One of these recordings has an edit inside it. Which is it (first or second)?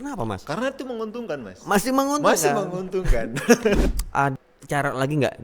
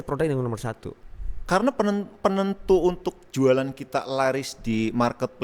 first